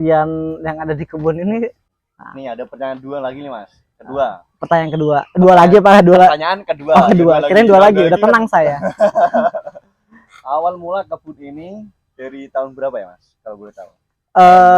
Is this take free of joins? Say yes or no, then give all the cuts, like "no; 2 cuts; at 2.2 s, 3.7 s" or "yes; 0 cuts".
no; 1 cut; at 1.9 s